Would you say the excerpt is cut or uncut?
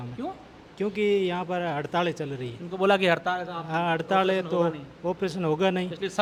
uncut